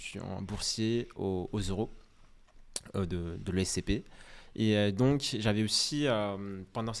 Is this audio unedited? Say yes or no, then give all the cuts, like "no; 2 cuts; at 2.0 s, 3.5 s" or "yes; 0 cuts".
yes; 0 cuts